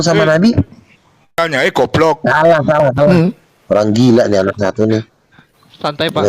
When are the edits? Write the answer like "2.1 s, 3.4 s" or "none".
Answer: 1.4 s